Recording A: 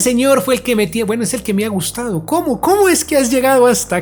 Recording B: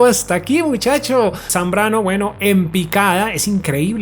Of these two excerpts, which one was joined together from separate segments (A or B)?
B